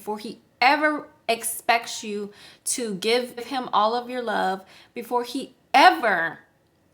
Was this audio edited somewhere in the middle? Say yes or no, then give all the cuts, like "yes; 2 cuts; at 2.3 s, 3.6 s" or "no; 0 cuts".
no; 0 cuts